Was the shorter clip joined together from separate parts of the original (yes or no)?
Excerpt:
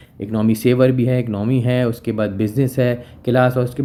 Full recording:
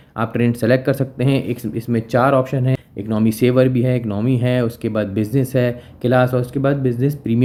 no